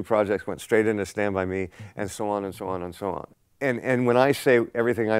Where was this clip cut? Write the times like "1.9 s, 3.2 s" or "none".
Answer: 3.3 s